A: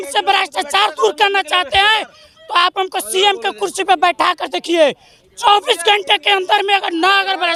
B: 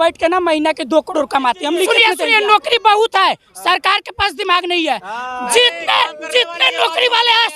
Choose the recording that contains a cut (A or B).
B